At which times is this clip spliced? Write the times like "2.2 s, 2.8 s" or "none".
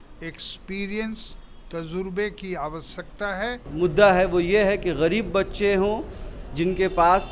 3.6 s